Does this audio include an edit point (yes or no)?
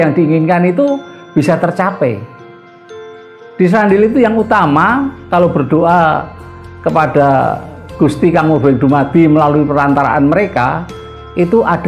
yes